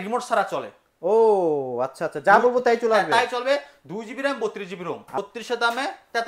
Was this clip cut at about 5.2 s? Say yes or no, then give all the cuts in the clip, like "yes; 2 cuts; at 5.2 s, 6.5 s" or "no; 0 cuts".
yes; 1 cut; at 5.2 s